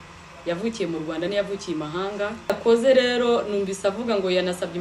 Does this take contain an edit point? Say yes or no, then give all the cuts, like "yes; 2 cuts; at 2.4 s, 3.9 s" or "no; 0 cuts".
yes; 1 cut; at 2.6 s